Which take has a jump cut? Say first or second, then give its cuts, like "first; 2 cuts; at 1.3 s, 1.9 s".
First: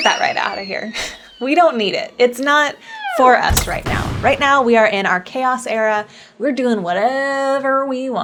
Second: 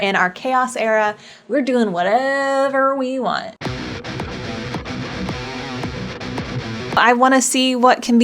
second; 1 cut; at 7.0 s